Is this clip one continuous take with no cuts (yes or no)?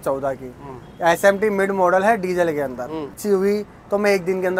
no